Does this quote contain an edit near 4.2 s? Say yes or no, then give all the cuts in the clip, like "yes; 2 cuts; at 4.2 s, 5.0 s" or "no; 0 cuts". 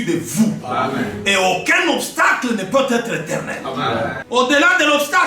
yes; 1 cut; at 4.2 s